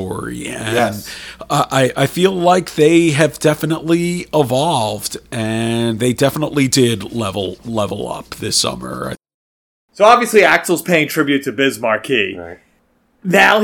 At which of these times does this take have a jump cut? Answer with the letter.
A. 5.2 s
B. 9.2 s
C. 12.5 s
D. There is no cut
B